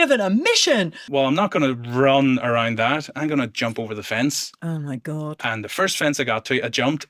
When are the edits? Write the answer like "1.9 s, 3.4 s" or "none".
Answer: 1.0 s